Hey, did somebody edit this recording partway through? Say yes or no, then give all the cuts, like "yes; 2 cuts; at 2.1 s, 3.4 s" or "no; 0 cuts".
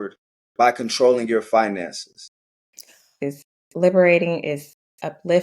yes; 1 cut; at 3.2 s